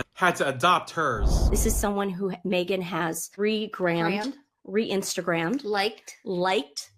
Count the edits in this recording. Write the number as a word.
one